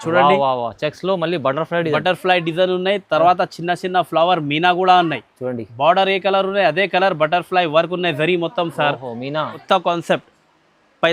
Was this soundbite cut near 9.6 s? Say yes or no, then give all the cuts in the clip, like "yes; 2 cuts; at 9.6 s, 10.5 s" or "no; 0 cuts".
yes; 1 cut; at 9.6 s